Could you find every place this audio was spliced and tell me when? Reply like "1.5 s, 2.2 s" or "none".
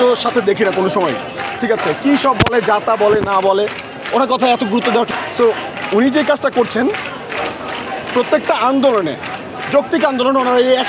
5.1 s